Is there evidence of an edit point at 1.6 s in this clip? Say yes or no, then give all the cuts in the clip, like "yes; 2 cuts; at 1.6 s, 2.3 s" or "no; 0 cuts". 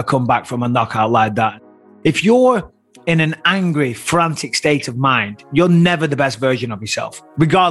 yes; 1 cut; at 1.6 s